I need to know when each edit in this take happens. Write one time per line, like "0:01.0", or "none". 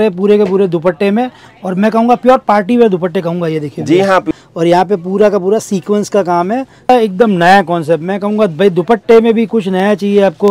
0:04.3
0:06.9